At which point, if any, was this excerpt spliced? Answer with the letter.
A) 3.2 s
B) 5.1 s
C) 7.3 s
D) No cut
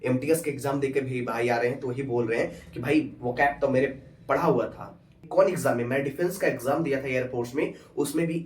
B